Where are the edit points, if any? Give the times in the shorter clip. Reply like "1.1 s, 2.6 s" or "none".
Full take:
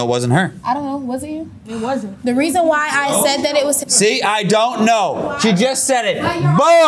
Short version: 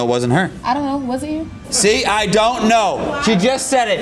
1.7 s